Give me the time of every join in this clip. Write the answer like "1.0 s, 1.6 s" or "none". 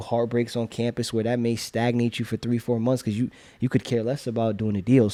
none